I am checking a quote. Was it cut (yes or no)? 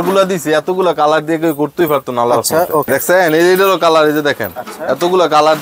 yes